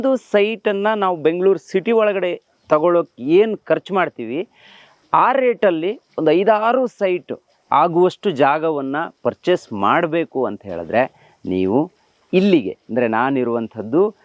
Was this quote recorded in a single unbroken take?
yes; 0 cuts

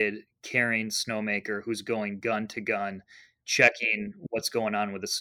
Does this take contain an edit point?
no; 0 cuts

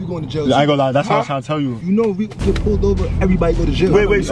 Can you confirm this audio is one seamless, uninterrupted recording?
yes; 0 cuts

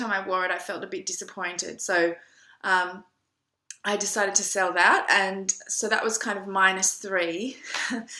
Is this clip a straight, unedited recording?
no; 1 cut; at 5.3 s

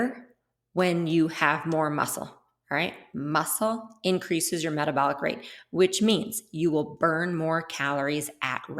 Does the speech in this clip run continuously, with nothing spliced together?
yes; 0 cuts

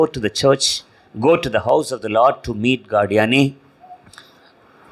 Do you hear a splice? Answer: no; 0 cuts

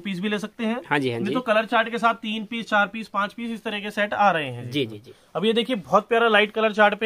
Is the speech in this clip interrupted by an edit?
no; 0 cuts

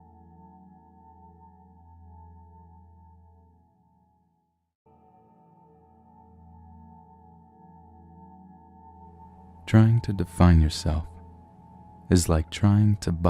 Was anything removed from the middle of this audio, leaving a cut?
no; 0 cuts

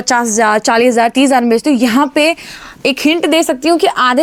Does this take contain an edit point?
no; 0 cuts

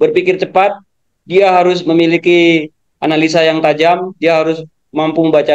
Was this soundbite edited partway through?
no; 0 cuts

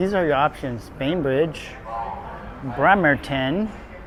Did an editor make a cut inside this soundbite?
no; 0 cuts

